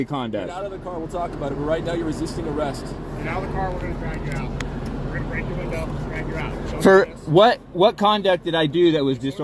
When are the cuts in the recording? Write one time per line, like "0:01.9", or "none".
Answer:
0:03.1